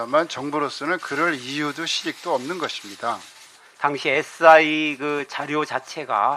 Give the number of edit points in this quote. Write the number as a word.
one